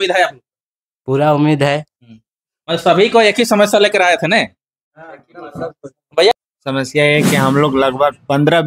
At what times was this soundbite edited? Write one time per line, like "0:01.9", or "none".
0:06.3